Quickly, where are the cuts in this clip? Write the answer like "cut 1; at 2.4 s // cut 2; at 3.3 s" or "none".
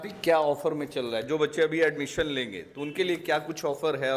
none